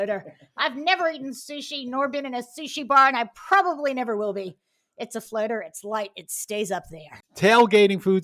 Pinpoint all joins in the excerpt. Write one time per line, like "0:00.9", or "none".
0:07.2